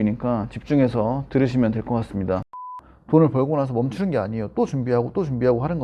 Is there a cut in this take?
yes; 1 cut; at 2.6 s

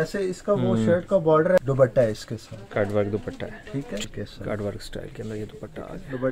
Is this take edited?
yes; 2 cuts; at 1.6 s, 4.0 s

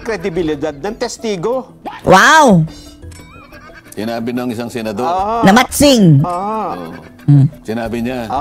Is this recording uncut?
yes; 0 cuts

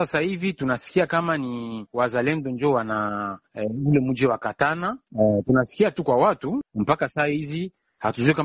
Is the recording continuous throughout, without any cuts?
yes; 0 cuts

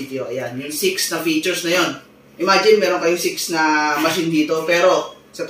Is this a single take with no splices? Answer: no; 1 cut; at 2.2 s

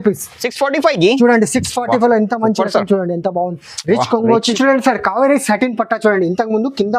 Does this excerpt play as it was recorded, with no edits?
no; 1 cut; at 4.5 s

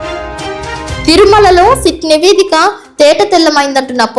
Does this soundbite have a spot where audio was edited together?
yes; 1 cut; at 1.0 s

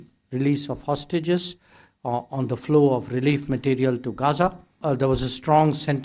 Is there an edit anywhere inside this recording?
yes; 1 cut; at 4.8 s

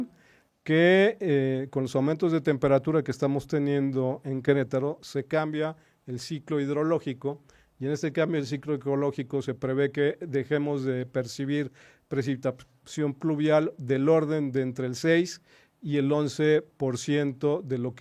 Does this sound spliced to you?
no; 0 cuts

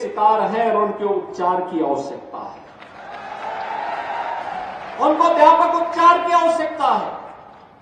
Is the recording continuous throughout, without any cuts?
yes; 0 cuts

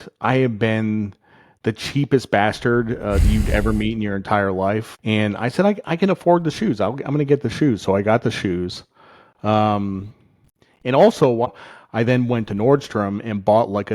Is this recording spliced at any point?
yes; 2 cuts; at 4.9 s, 11.5 s

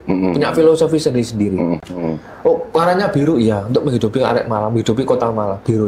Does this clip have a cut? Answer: no; 0 cuts

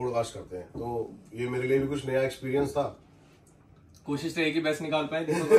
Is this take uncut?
yes; 0 cuts

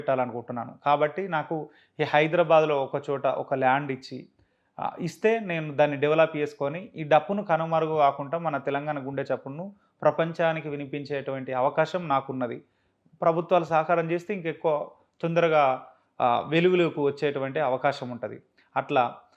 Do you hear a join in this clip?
no; 0 cuts

